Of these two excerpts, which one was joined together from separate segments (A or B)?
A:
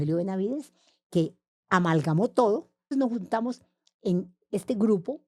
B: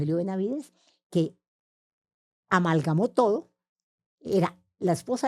A